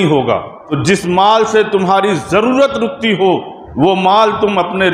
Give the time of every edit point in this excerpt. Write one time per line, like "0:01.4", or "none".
0:00.8
0:03.6